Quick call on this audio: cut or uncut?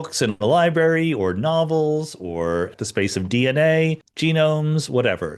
cut